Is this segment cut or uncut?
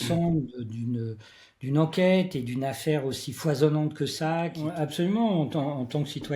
cut